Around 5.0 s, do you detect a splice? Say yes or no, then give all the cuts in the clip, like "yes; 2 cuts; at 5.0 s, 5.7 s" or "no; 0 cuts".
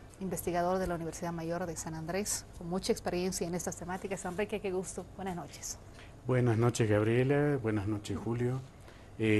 no; 1 cut; at 7.9 s